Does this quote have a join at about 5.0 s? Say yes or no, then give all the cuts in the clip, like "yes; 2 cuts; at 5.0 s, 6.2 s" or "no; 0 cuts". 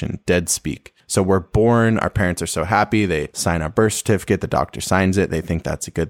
no; 2 cuts; at 0.9 s, 3.3 s